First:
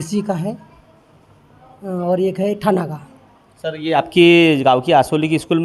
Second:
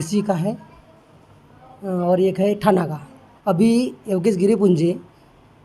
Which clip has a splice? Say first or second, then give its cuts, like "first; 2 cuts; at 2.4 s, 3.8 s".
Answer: second; 1 cut; at 3.3 s